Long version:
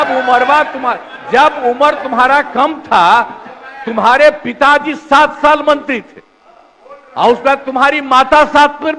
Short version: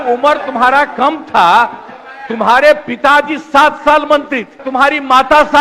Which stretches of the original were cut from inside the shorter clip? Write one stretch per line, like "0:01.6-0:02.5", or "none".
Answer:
0:06.2-0:07.7